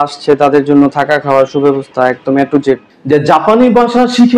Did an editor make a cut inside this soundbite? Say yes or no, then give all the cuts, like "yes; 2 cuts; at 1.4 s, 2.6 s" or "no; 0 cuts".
yes; 1 cut; at 2.9 s